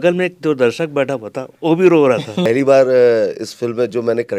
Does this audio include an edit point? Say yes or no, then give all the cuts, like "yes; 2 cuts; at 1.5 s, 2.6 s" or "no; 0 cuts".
yes; 1 cut; at 2.5 s